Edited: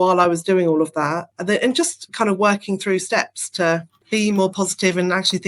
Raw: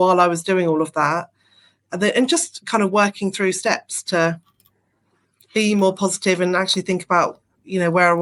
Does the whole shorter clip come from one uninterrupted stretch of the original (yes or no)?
no